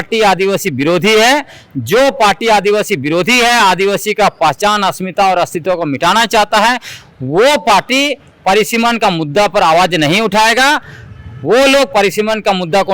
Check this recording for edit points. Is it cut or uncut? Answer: uncut